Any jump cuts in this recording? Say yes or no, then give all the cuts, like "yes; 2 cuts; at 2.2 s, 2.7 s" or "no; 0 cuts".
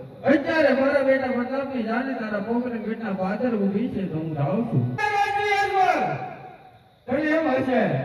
yes; 1 cut; at 5.0 s